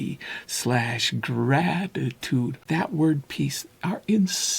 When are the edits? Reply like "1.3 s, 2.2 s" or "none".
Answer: 2.6 s, 3.7 s